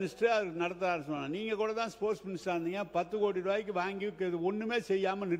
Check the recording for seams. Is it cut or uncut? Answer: uncut